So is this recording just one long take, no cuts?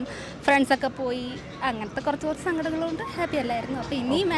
yes; 0 cuts

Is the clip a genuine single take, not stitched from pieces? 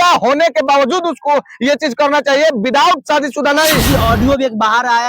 no; 1 cut; at 3.9 s

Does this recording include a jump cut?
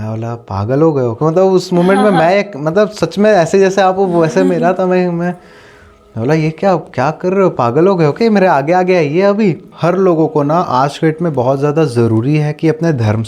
yes; 1 cut; at 9.7 s

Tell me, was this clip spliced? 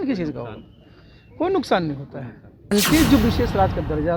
yes; 1 cut; at 2.7 s

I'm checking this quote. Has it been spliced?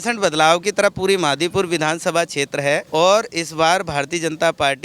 yes; 1 cut; at 2.9 s

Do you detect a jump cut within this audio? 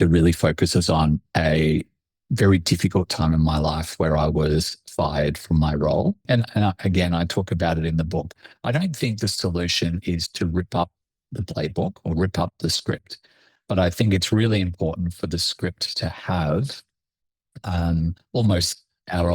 yes; 1 cut; at 6.2 s

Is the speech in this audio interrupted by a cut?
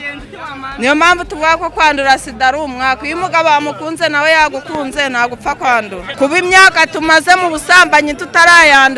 yes; 1 cut; at 6.0 s

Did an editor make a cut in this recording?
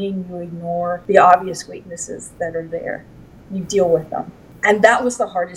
yes; 1 cut; at 1.0 s

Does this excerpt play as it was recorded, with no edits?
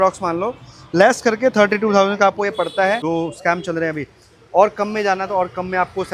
no; 1 cut; at 3.0 s

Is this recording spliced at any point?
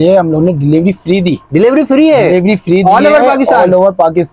no; 0 cuts

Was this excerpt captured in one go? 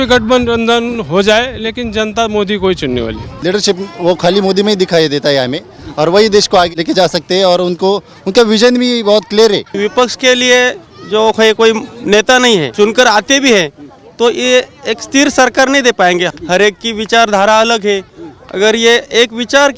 no; 5 cuts; at 3.4 s, 6.7 s, 9.7 s, 12.7 s, 16.3 s

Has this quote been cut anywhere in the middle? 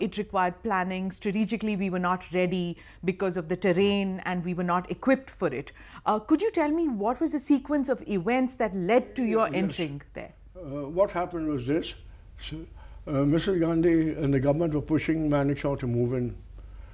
no; 0 cuts

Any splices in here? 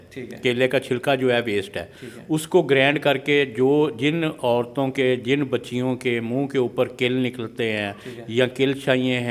no; 0 cuts

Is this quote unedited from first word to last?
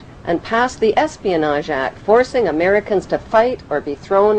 no; 1 cut; at 2.4 s

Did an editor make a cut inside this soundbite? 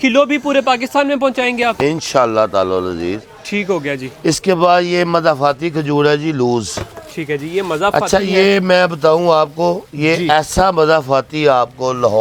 no; 0 cuts

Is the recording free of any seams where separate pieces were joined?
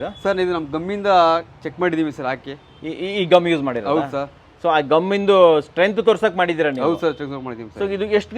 yes; 0 cuts

